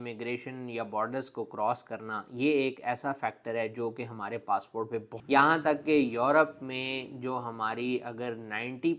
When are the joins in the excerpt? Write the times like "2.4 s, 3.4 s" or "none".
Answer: 5.1 s